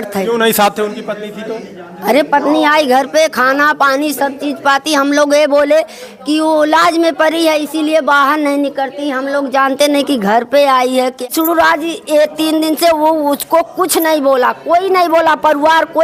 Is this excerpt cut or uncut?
cut